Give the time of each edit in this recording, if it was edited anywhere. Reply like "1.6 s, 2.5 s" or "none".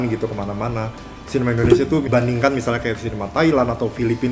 2.1 s